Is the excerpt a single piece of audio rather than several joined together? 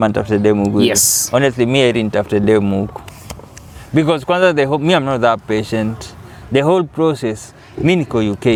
yes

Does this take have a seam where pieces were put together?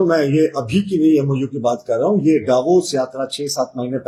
no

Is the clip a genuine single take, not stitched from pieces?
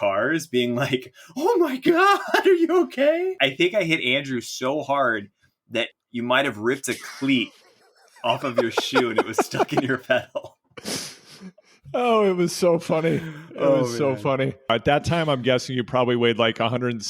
no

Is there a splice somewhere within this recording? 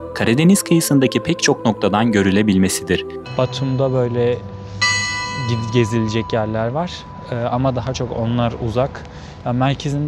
yes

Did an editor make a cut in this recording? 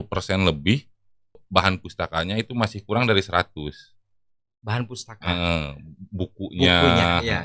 yes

